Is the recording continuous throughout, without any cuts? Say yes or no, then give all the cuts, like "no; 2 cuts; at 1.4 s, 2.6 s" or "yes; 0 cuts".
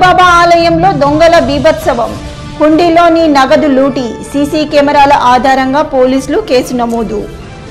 yes; 0 cuts